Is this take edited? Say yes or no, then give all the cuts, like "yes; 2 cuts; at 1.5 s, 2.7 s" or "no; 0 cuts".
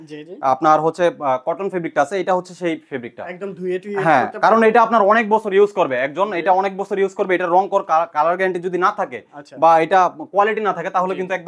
no; 0 cuts